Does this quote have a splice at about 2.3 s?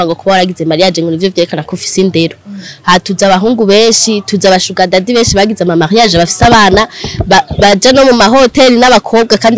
no; 0 cuts

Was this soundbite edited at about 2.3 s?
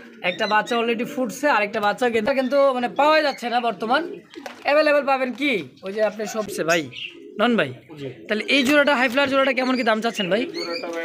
yes; 2 cuts; at 2.3 s, 6.5 s

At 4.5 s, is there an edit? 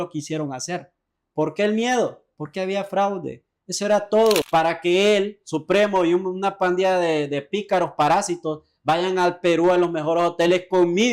yes; 1 cut; at 4.5 s

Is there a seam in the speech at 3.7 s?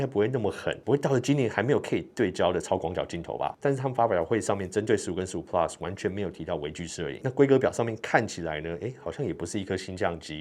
no; 0 cuts

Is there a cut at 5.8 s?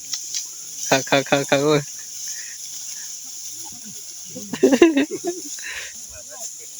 yes; 1 cut; at 5.8 s

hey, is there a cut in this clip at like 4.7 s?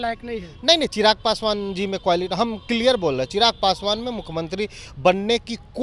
no; 0 cuts

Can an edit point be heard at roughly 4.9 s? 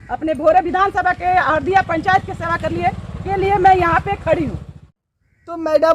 yes; 1 cut; at 4.9 s

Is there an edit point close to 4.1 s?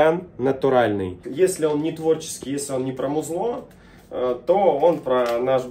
no; 1 cut; at 1.2 s

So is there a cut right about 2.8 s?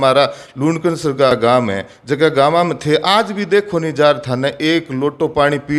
no; 1 cut; at 1.3 s

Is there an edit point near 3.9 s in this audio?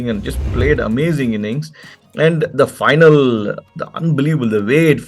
no; 1 cut; at 2.0 s

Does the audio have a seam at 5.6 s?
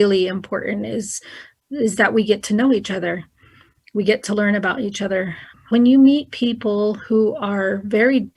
yes; 1 cut; at 5.6 s

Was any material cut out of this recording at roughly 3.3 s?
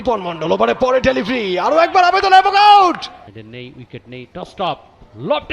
yes; 1 cut; at 3.3 s

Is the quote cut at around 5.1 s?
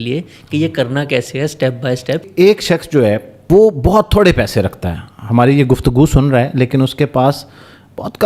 no; 2 cuts; at 2.3 s, 3.3 s

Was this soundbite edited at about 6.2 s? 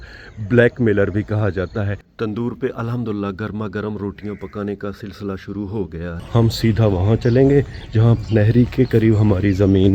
yes; 2 cuts; at 2.0 s, 6.2 s

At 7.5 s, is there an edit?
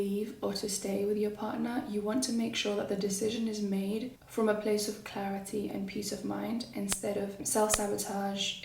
yes; 1 cut; at 7.5 s

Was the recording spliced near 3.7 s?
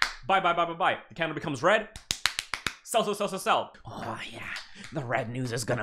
yes; 1 cut; at 3.7 s

